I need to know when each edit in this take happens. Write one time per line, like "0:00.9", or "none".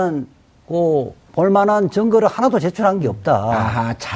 0:01.9